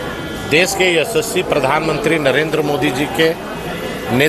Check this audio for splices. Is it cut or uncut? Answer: uncut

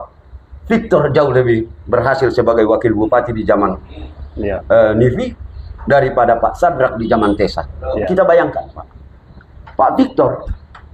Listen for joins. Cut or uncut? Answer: cut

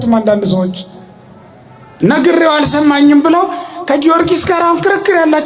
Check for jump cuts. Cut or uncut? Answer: uncut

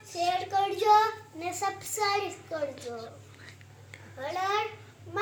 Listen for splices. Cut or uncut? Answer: uncut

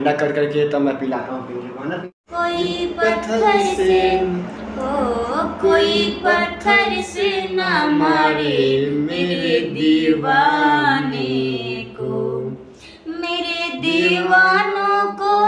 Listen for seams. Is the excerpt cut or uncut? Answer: cut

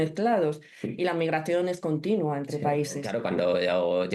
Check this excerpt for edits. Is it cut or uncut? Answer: cut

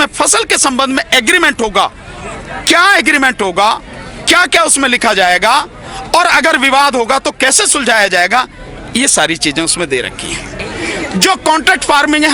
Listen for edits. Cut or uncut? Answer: cut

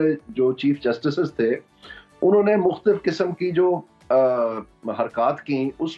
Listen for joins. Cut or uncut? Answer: uncut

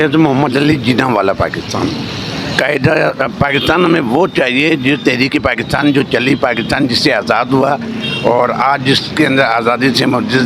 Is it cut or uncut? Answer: uncut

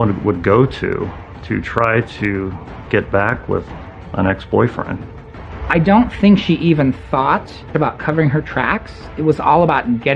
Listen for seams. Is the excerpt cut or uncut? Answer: cut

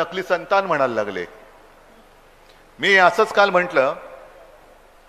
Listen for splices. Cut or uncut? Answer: uncut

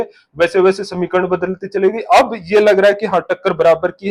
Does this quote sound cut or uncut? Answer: uncut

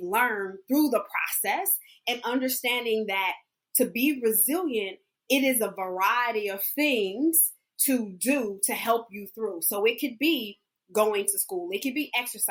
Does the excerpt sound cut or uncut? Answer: uncut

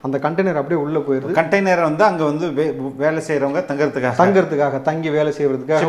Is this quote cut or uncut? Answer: uncut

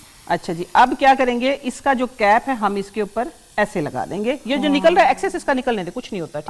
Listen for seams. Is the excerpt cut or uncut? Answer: uncut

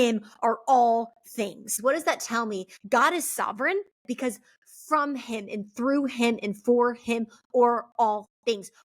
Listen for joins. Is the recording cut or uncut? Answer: cut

